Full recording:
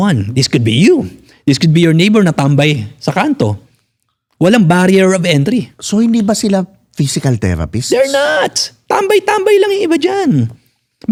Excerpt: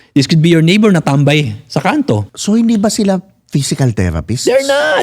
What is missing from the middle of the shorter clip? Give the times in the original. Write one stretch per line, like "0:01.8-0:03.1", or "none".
0:03.6-0:05.8

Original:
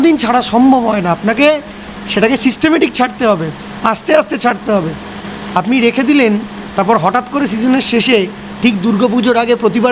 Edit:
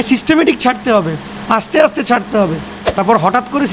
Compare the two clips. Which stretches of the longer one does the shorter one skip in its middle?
0:05.1-0:06.6

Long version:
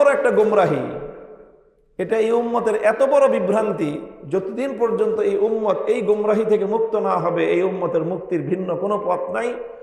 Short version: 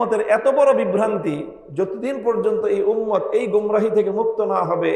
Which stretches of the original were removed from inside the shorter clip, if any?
none

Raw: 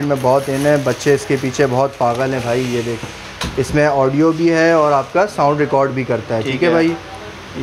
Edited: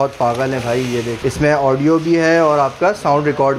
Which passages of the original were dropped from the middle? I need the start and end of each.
0:02.9-0:03.5

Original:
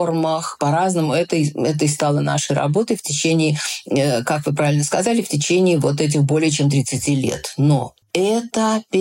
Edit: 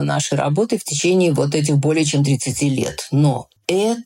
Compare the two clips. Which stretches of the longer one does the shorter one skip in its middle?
0:03.1-0:05.4

